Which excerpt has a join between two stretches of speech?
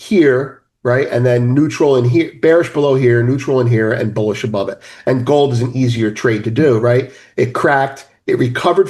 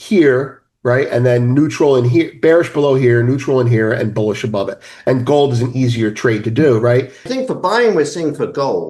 second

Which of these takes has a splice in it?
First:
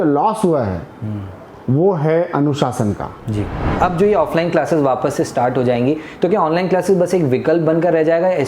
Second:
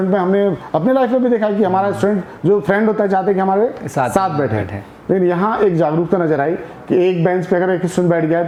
first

